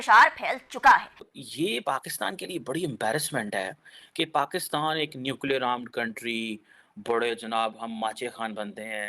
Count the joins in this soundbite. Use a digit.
1